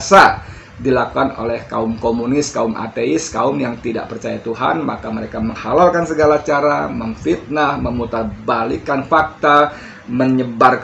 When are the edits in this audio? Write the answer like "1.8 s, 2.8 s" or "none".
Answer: none

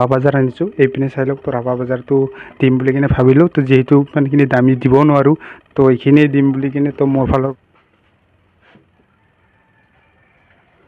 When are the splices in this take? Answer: 7.5 s

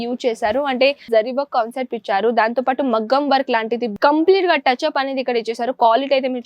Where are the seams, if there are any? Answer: 1.1 s, 3.9 s

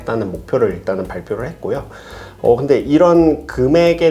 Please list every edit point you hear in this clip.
none

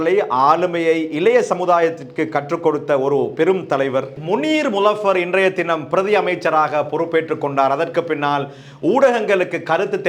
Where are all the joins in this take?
4.1 s

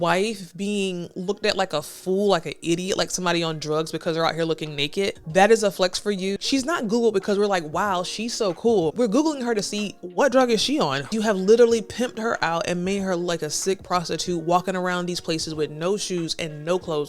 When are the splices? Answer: 5.2 s, 6.4 s, 8.9 s, 11.1 s

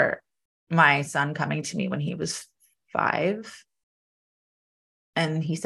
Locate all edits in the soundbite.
none

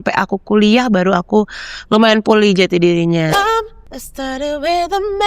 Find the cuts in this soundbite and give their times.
3.3 s

